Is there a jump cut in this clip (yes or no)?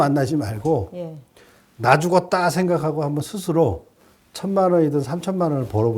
no